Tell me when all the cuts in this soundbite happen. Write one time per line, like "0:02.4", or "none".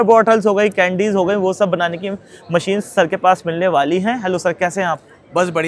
none